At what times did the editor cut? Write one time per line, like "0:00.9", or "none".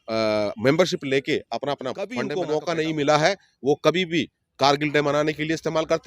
0:02.3